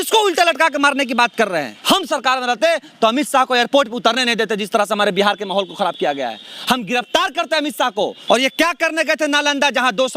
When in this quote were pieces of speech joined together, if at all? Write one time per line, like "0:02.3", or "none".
0:01.7
0:08.2